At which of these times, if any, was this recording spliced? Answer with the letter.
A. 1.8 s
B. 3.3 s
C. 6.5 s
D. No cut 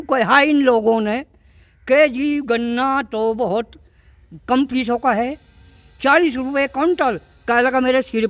D